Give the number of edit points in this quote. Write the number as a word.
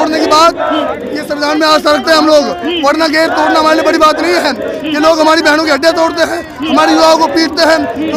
zero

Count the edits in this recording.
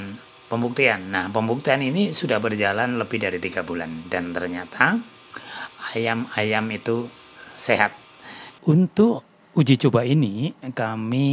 one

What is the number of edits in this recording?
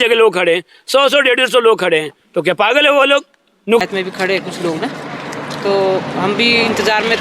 one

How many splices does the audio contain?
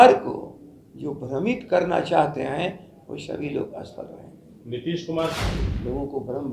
one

